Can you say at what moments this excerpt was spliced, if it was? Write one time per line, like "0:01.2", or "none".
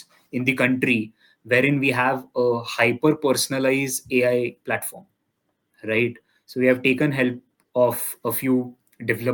none

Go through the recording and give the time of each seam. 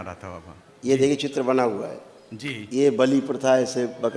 none

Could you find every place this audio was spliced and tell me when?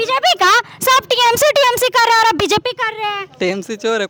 none

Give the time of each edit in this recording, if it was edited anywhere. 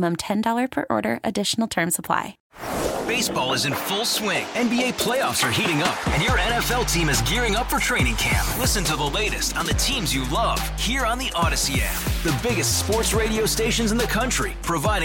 0:02.4

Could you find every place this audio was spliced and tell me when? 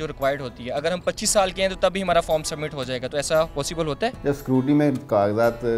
0:04.2

